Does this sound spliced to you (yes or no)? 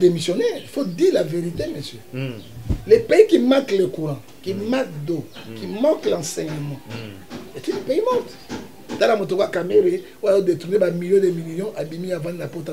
yes